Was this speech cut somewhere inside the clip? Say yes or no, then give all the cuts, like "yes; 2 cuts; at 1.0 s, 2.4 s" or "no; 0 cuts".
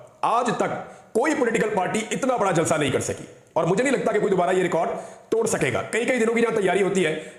no; 0 cuts